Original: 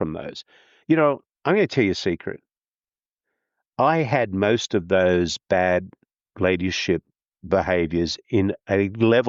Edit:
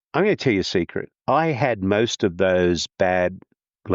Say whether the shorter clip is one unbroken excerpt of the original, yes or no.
no